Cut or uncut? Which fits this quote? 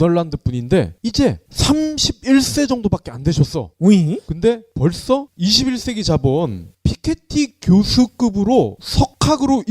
cut